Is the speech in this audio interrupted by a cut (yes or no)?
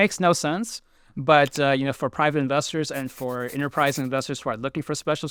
no